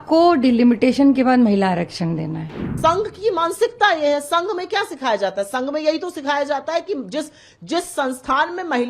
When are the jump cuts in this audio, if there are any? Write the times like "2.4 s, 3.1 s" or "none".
2.7 s